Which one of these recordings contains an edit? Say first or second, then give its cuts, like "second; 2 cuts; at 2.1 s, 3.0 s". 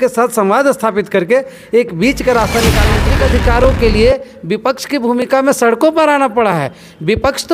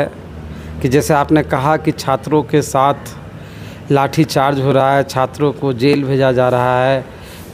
first; 1 cut; at 3.0 s